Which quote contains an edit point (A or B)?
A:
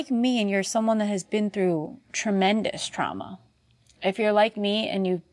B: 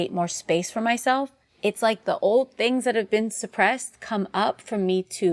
B